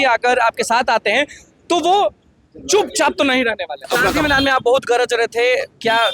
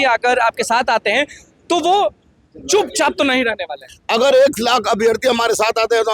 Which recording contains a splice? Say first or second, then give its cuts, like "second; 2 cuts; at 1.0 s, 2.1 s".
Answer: first; 1 cut; at 3.9 s